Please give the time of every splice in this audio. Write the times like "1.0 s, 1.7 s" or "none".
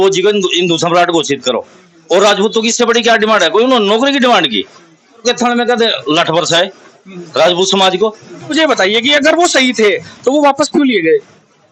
5.2 s, 8.5 s